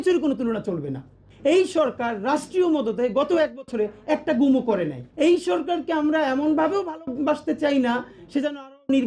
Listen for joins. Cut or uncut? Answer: cut